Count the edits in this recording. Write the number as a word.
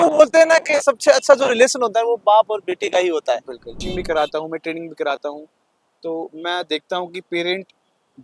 one